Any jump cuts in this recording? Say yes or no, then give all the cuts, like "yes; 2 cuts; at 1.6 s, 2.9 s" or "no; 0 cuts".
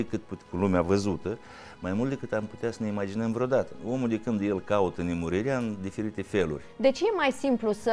yes; 2 cuts; at 3.8 s, 6.6 s